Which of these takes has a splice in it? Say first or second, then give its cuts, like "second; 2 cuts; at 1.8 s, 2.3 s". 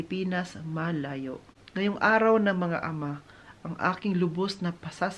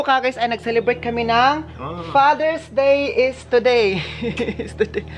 first; 1 cut; at 1.5 s